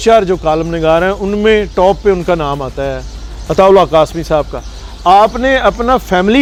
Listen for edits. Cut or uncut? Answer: uncut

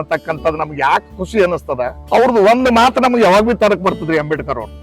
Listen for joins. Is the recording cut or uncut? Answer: cut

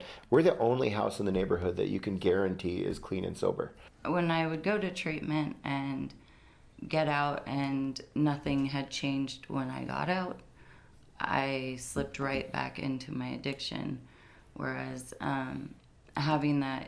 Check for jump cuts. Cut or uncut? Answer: cut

